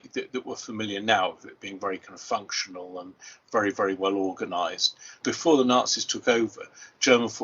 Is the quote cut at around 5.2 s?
yes; 1 cut; at 5.2 s

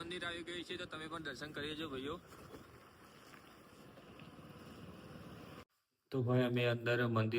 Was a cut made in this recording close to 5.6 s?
yes; 1 cut; at 5.6 s

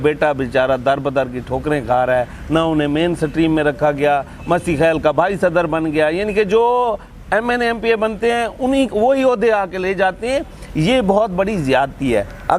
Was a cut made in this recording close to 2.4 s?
no; 0 cuts

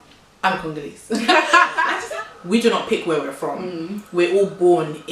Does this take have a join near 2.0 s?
yes; 1 cut; at 2.0 s

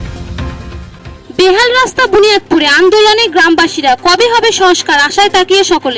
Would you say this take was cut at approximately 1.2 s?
yes; 1 cut; at 1.2 s

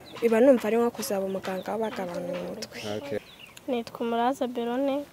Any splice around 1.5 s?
no; 1 cut; at 3.2 s

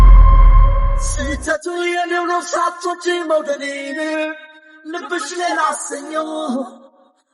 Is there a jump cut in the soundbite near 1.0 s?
yes; 1 cut; at 1.0 s

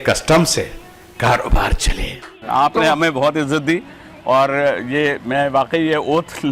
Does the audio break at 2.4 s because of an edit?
yes; 1 cut; at 2.4 s

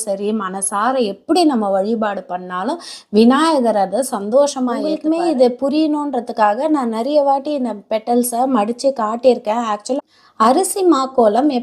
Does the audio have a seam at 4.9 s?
yes; 2 cuts; at 4.9 s, 10.0 s

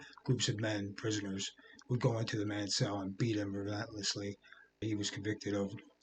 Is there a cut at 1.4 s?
no; 1 cut; at 4.8 s

